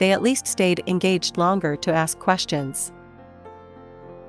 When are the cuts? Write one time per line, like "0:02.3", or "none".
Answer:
0:02.8